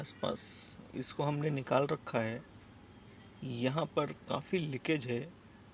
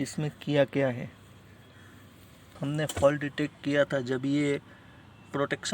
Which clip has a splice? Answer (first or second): second